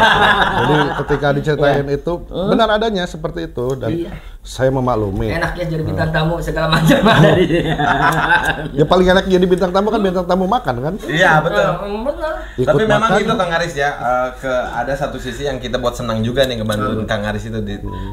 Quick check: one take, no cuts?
yes; 0 cuts

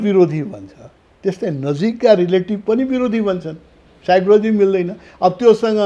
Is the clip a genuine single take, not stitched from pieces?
yes; 0 cuts

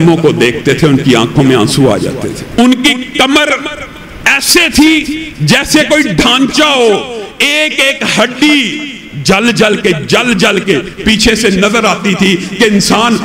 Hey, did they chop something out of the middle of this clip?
yes; 1 cut; at 2.5 s

